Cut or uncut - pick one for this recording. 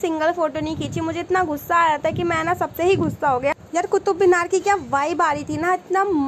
cut